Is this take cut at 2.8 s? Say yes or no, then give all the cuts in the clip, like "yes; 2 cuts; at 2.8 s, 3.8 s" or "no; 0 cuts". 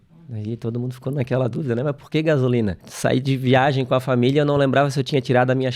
yes; 1 cut; at 2.8 s